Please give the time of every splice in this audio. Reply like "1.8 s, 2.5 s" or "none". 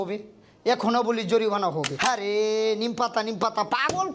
1.9 s